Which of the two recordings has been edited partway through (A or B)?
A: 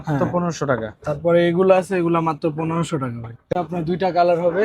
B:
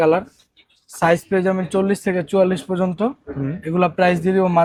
A